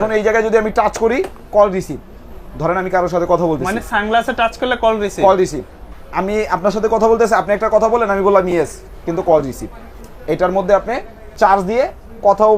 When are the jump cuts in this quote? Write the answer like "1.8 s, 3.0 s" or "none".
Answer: none